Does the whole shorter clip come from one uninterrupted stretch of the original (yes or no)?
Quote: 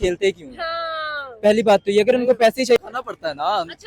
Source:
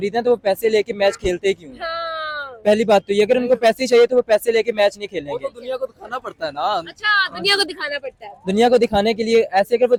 no